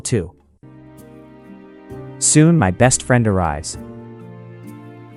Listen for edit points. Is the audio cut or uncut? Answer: uncut